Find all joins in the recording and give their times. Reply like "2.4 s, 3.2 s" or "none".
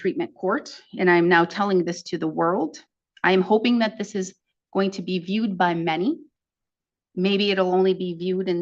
none